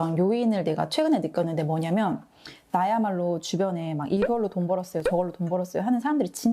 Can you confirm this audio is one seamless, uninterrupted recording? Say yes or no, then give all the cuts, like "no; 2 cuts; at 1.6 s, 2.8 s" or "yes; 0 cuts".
yes; 0 cuts